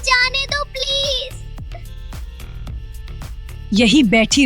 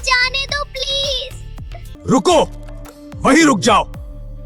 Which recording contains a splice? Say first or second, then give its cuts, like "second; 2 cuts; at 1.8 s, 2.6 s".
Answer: second; 1 cut; at 1.8 s